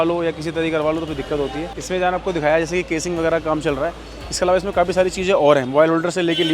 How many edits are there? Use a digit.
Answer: 1